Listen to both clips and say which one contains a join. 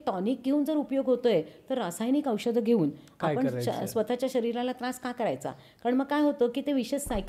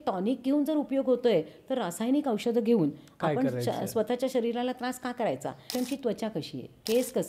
second; 1 cut; at 5.7 s

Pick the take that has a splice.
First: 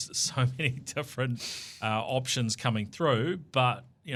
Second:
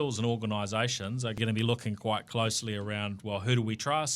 second; 1 cut; at 1.4 s

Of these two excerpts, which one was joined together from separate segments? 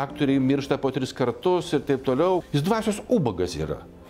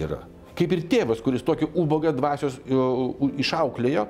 first; 1 cut; at 2.4 s

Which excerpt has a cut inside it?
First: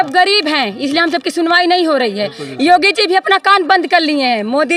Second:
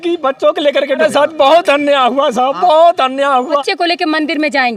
second; 2 cuts; at 1.0 s, 3.6 s

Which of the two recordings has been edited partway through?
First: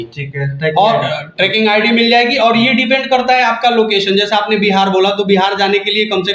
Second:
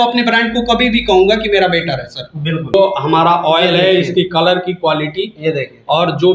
second; 1 cut; at 2.7 s

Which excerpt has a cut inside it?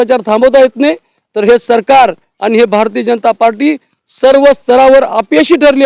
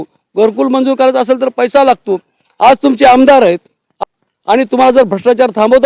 second; 1 cut; at 3.9 s

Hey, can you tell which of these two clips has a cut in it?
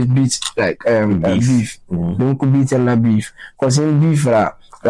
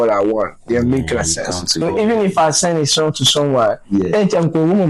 second; 1 cut; at 1.8 s

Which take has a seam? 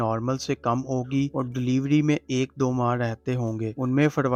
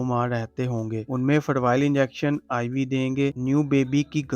second; 1 cut; at 3.4 s

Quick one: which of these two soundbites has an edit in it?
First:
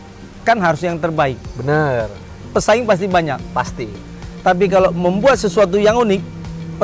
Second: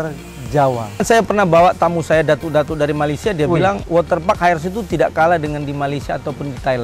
second; 2 cuts; at 1.0 s, 3.8 s

